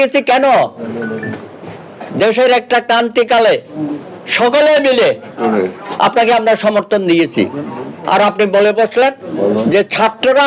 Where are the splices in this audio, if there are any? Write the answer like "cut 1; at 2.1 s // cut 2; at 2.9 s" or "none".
none